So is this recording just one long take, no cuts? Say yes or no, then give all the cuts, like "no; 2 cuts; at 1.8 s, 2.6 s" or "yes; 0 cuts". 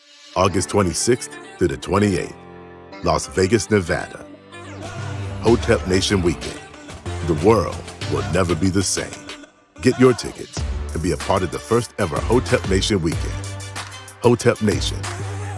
no; 1 cut; at 8.5 s